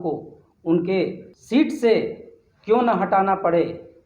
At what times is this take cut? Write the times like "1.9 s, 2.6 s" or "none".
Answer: 1.3 s